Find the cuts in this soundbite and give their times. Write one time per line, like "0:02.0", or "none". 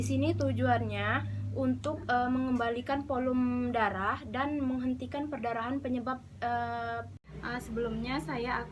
0:07.3